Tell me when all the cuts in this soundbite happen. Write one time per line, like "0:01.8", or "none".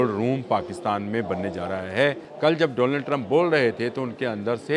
0:02.3